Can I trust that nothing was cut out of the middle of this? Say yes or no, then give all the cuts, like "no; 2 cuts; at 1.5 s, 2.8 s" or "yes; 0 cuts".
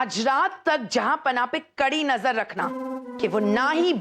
no; 1 cut; at 3.1 s